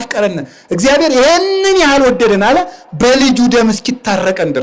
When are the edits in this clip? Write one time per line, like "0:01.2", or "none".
none